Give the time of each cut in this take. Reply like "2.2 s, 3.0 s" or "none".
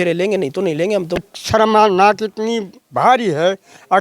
1.2 s